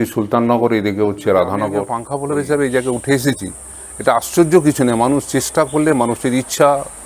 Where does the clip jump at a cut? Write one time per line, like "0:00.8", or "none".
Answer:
0:02.0